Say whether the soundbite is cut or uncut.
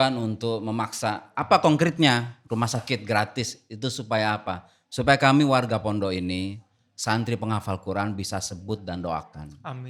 uncut